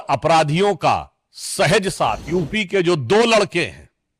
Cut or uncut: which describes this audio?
cut